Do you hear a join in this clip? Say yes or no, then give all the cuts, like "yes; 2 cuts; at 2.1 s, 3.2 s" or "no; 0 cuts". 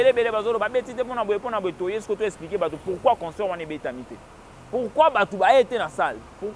no; 0 cuts